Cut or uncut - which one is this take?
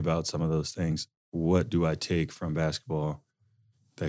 cut